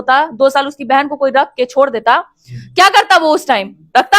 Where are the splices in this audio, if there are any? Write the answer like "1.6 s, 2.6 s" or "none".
none